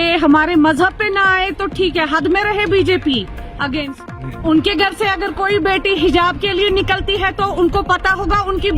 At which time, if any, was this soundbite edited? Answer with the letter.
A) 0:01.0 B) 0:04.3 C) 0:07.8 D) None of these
B